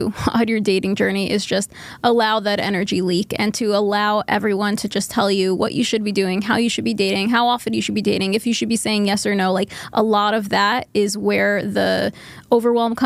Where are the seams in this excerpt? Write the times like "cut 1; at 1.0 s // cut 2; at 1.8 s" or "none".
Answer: none